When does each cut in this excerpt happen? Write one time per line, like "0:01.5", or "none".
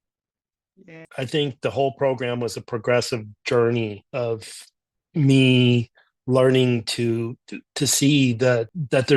0:01.0